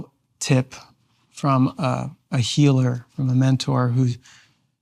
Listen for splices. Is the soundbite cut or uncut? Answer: uncut